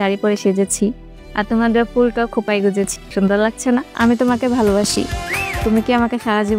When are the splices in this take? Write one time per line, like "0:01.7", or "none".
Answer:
0:03.0
0:03.9
0:05.5